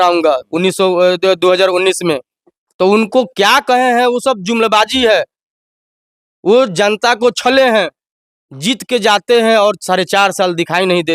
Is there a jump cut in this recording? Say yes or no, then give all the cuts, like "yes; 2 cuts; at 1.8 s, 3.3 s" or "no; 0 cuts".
no; 0 cuts